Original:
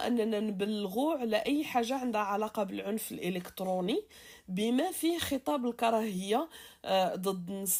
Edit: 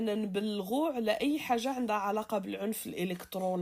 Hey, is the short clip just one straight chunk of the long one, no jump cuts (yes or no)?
yes